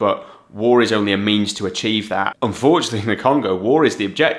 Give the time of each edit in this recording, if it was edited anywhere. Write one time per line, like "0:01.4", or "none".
0:02.3